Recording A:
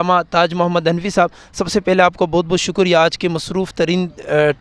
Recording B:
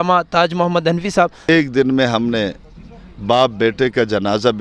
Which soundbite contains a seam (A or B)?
B